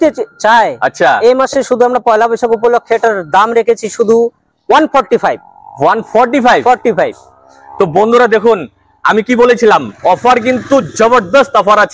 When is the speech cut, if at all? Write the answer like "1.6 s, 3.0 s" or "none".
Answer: none